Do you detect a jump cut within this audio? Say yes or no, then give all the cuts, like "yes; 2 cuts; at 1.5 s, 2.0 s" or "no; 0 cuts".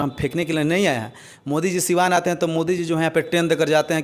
no; 0 cuts